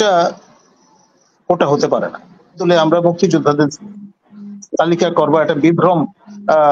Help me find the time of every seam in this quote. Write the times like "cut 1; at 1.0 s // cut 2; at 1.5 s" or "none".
cut 1; at 2.6 s